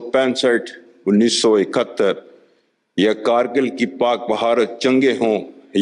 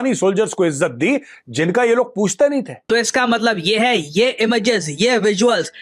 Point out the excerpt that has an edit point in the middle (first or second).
second